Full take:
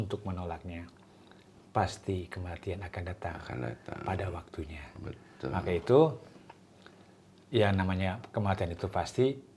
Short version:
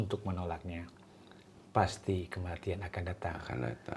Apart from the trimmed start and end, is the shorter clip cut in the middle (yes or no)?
no